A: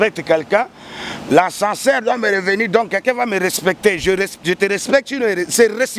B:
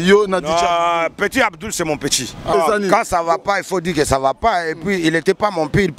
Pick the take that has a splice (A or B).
B